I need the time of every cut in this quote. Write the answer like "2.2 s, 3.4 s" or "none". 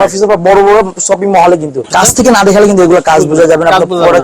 1.9 s